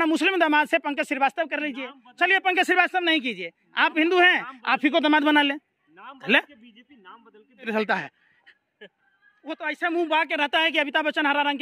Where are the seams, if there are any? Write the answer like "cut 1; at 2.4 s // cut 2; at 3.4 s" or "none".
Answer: cut 1; at 7.7 s